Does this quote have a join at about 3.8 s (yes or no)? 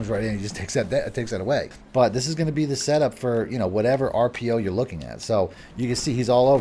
no